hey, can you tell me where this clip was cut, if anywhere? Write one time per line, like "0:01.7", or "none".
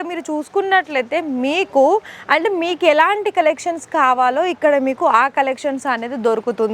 none